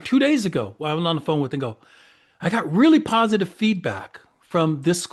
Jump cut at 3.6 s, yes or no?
no